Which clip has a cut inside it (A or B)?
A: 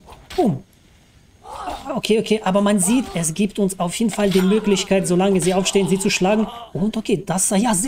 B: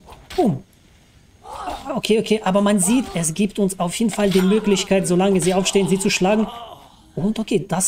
A